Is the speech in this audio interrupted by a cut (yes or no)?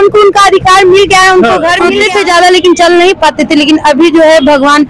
yes